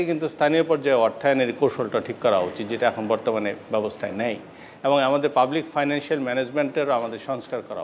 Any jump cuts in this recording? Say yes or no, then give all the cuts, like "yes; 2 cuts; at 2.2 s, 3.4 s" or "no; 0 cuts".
no; 0 cuts